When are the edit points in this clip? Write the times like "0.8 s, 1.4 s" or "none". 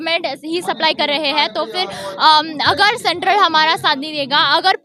none